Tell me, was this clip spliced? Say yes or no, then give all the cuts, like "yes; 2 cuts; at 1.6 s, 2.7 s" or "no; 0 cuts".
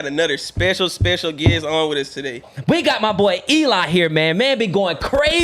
yes; 1 cut; at 2.4 s